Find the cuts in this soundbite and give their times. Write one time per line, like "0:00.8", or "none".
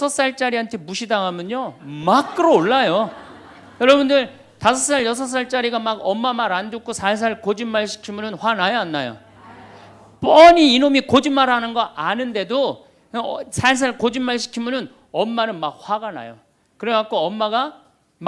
none